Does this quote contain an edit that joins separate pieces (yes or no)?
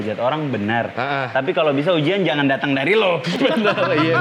yes